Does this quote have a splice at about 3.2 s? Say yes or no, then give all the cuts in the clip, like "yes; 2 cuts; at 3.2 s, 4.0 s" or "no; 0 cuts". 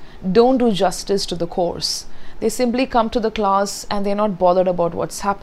no; 0 cuts